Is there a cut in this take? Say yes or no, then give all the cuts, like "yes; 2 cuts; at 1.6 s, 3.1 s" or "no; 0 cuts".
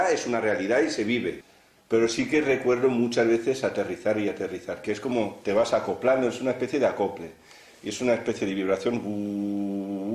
yes; 1 cut; at 1.4 s